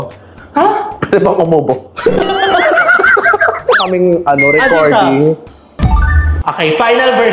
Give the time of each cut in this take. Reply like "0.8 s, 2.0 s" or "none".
3.8 s